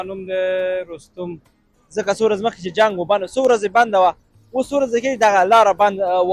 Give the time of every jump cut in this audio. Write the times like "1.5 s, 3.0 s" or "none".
1.7 s